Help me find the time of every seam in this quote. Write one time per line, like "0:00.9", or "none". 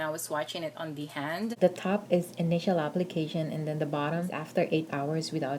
0:01.5
0:04.4